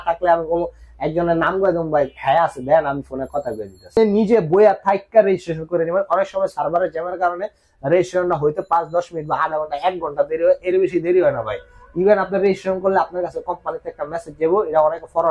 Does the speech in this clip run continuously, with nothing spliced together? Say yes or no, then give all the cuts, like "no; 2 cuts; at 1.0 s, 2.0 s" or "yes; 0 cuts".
no; 1 cut; at 4.0 s